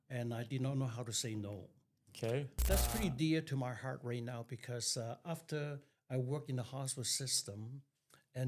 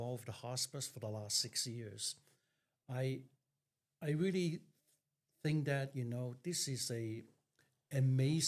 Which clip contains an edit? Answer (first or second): first